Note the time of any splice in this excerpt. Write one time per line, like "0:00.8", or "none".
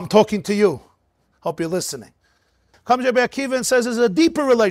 0:02.7